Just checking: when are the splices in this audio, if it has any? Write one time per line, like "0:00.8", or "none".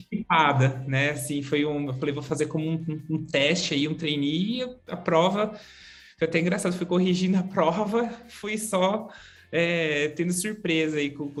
none